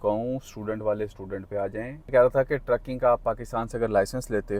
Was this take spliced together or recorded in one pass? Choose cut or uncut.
cut